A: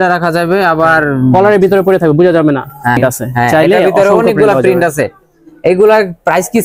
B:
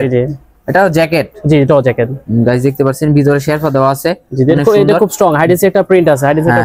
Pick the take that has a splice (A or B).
A